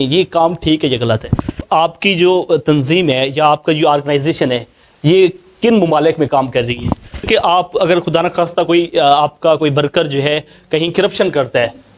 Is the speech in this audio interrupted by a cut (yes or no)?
yes